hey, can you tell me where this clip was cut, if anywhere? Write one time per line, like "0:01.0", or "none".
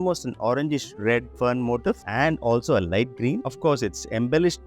0:01.3
0:03.4